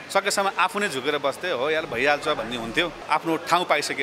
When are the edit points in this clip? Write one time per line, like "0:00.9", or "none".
0:03.0